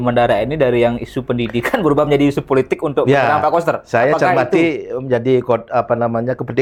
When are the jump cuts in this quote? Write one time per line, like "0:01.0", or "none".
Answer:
none

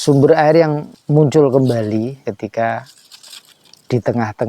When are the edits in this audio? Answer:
0:00.9
0:02.3

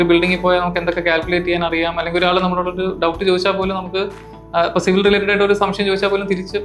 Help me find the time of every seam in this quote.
none

